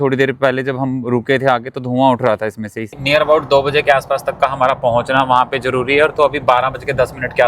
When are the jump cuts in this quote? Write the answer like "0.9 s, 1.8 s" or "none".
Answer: 2.9 s

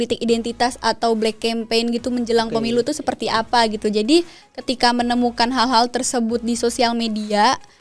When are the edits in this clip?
none

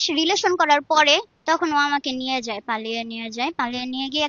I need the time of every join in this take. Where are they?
1.3 s

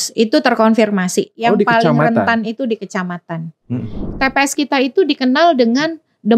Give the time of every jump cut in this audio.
1.3 s, 4.1 s

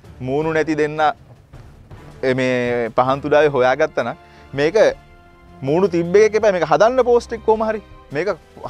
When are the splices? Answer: none

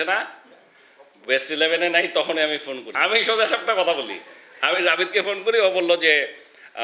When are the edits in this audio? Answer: 2.8 s

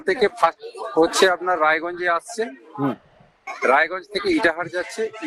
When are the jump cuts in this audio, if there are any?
none

